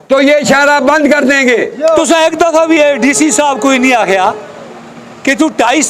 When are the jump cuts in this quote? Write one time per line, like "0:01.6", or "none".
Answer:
0:02.0